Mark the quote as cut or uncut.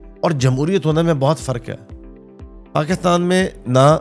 uncut